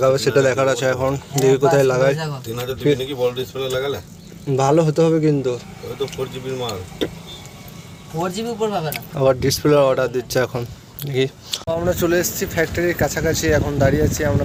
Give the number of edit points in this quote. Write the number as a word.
zero